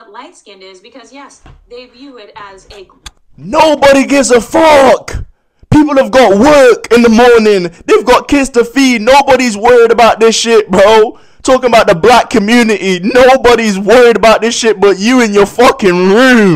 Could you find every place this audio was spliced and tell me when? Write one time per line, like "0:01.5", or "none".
none